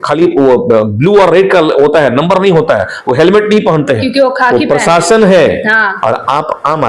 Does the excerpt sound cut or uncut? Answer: cut